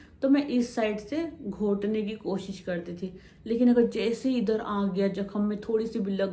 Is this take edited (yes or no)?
no